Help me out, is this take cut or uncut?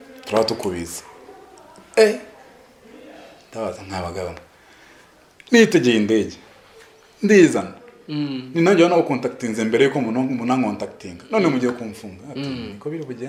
uncut